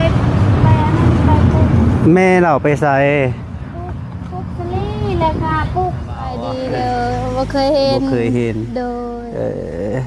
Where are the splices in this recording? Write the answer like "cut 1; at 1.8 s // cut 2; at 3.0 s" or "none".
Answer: cut 1; at 6.4 s